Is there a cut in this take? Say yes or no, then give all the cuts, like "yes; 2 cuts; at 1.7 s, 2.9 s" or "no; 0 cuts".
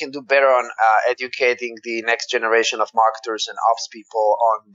no; 0 cuts